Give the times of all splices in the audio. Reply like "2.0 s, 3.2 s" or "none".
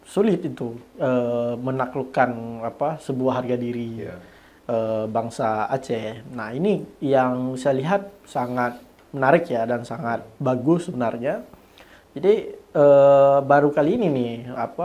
none

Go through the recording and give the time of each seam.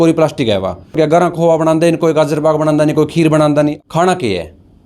1.0 s, 3.8 s

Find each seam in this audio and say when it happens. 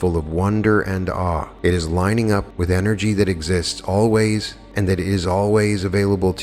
1.5 s, 2.5 s, 4.6 s

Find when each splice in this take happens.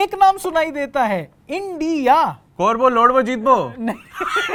none

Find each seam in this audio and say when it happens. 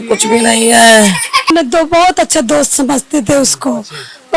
1.5 s

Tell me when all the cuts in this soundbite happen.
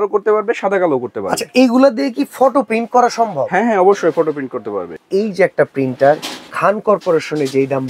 5.0 s

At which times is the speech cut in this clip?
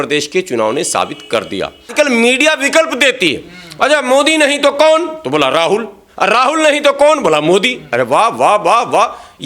1.9 s

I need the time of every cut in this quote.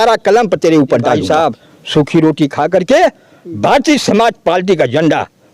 1.2 s

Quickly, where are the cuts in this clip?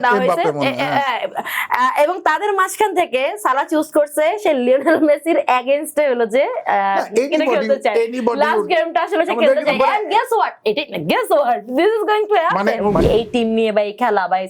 13.0 s

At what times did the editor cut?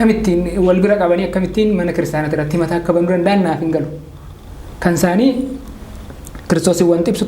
none

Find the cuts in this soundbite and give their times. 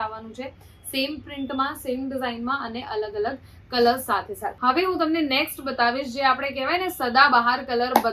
none

